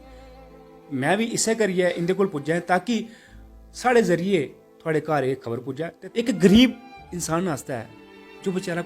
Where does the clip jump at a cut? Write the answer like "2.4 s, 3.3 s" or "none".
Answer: 6.0 s